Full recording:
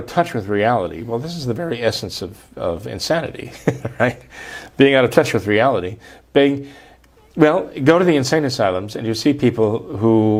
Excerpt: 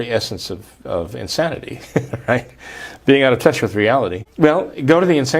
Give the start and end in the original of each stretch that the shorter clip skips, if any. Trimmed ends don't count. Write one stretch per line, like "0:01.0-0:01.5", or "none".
0:05.9-0:07.2